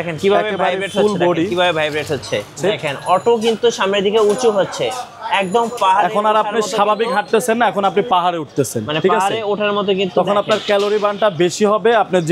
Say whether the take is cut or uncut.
cut